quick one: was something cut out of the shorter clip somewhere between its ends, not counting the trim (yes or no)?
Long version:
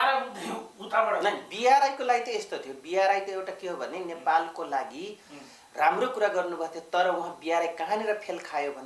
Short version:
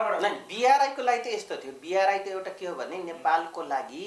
no